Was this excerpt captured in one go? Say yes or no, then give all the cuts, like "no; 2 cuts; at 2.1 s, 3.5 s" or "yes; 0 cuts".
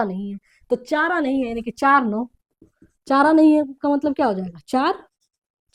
yes; 0 cuts